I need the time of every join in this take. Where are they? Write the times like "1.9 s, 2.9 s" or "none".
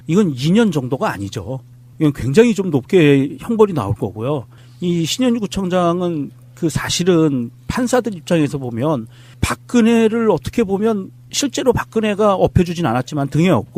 none